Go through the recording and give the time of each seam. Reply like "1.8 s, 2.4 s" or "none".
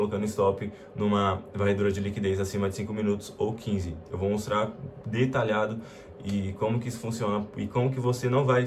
none